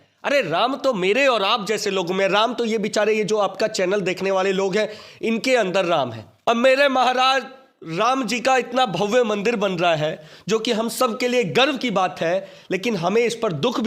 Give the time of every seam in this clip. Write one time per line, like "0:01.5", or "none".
0:06.2

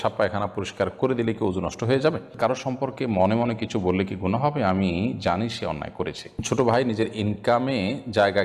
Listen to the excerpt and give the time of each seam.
0:02.3
0:06.4

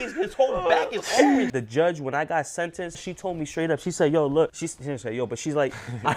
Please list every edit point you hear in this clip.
0:01.5
0:03.0
0:04.7

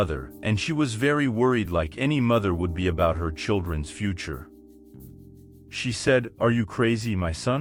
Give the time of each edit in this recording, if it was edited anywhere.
none

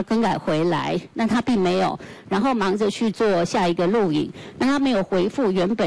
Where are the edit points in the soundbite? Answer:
none

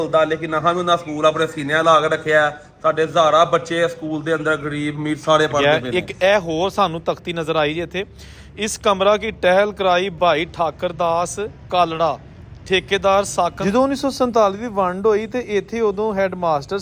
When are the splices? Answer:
0:05.6
0:13.6

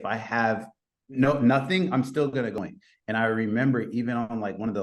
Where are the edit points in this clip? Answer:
0:02.5

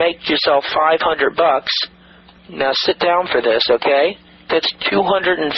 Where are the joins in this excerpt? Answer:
0:04.3

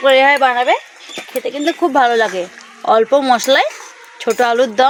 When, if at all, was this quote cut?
none

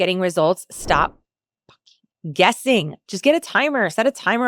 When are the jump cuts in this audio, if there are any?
none

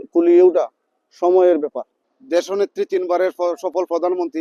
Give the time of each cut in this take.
0:02.1

